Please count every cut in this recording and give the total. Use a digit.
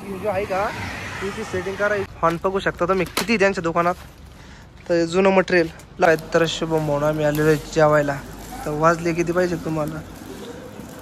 2